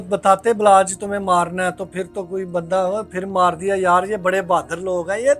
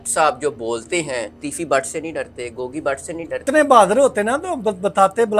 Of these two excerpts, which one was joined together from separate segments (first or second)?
second